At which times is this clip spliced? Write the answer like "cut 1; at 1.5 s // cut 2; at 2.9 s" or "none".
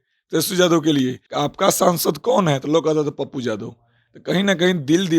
cut 1; at 1.2 s